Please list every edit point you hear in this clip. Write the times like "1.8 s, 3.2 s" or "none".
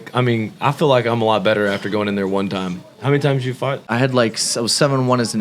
3.9 s